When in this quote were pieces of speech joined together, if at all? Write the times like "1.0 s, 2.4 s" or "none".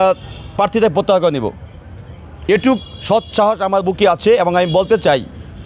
none